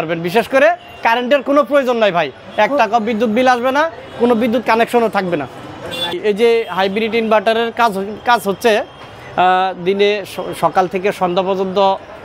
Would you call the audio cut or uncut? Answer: uncut